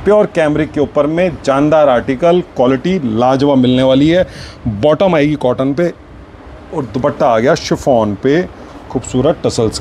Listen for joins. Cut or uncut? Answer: uncut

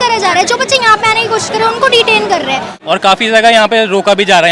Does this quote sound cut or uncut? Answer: cut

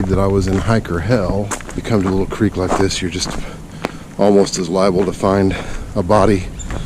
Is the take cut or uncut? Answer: cut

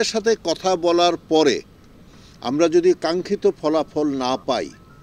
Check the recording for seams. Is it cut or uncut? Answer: uncut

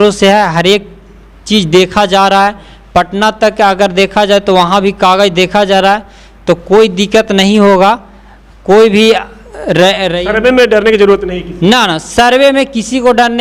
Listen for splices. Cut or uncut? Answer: uncut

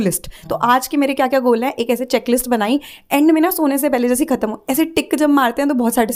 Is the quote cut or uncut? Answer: uncut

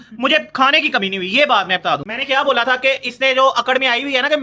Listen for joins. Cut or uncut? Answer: cut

